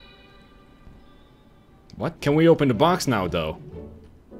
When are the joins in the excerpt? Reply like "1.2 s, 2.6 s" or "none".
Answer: 2.2 s